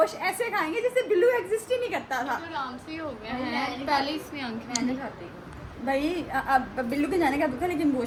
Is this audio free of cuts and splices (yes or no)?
yes